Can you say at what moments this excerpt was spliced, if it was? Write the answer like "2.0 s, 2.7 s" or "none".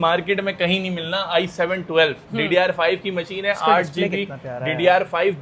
none